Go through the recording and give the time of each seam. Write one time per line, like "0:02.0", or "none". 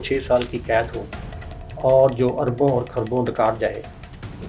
none